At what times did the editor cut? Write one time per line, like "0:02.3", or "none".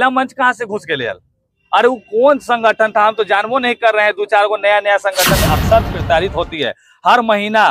0:05.4